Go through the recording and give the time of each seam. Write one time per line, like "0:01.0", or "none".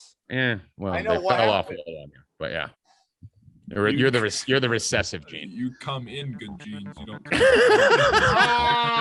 none